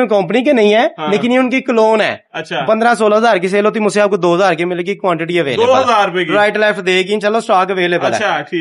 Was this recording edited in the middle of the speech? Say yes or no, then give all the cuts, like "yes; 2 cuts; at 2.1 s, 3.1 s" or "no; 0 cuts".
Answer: no; 0 cuts